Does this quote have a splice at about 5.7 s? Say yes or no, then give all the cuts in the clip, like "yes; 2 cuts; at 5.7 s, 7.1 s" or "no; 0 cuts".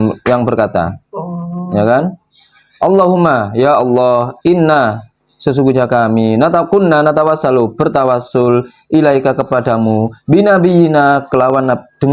no; 0 cuts